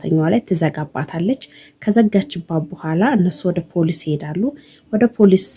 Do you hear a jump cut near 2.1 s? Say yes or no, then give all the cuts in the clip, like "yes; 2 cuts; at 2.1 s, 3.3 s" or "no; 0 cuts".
no; 0 cuts